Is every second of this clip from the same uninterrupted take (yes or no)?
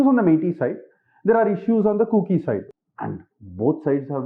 no